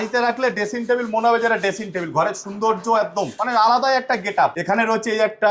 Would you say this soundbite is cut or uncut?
cut